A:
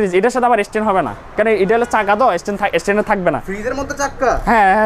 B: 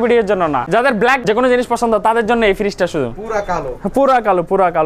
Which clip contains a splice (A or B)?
B